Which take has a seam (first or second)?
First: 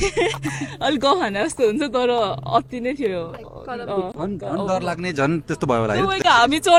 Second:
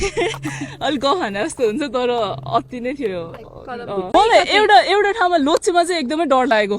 second